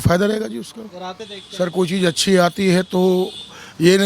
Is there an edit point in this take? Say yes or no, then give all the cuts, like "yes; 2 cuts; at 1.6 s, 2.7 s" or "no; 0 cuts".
yes; 1 cut; at 1.2 s